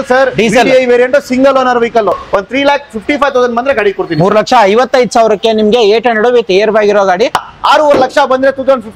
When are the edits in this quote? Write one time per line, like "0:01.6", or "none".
0:02.2
0:07.4